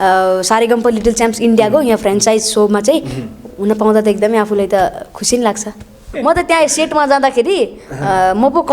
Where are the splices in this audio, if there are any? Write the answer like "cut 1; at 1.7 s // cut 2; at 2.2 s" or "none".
cut 1; at 6.1 s

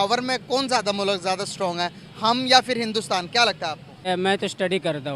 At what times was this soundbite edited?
cut 1; at 4.1 s

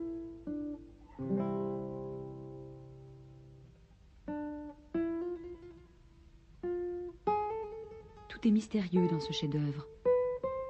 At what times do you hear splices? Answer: cut 1; at 6.4 s

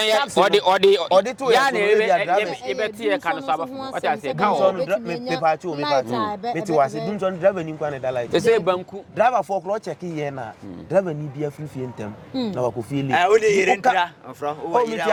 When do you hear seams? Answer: none

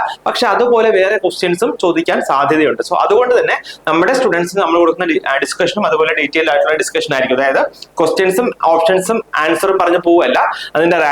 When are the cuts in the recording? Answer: none

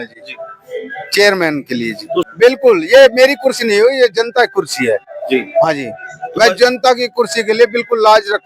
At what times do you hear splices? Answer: cut 1; at 2.3 s

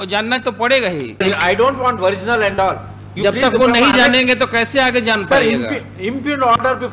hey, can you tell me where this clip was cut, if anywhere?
cut 1; at 1.2 s

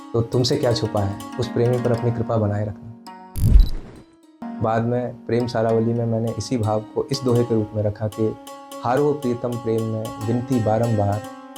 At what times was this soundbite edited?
none

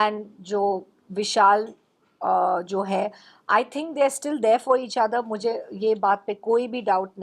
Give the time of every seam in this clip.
none

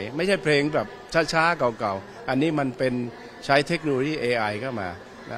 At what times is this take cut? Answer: none

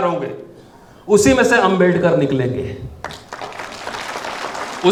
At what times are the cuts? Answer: none

